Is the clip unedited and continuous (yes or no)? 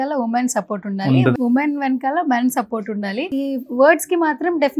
no